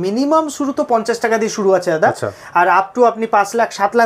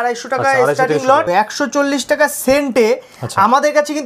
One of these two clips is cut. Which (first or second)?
second